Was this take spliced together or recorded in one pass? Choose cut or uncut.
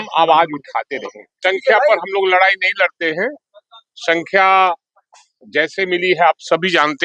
cut